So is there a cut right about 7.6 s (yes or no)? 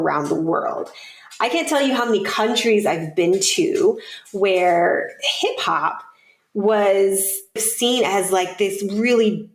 yes